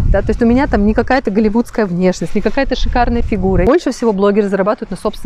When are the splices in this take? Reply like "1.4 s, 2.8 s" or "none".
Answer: 3.6 s